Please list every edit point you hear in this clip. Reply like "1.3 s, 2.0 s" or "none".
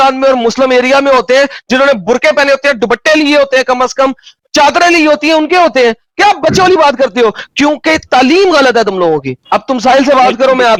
none